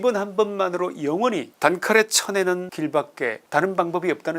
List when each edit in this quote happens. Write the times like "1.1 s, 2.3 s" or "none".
1.5 s, 3.1 s